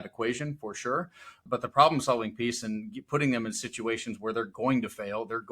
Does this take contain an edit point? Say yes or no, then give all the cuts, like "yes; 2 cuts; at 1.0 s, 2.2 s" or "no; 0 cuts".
yes; 1 cut; at 1.4 s